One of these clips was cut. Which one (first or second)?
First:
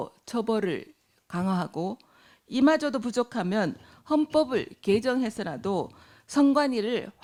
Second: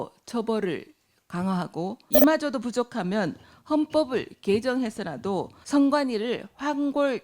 second